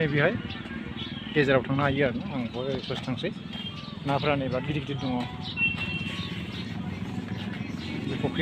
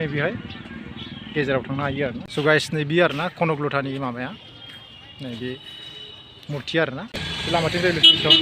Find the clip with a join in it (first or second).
second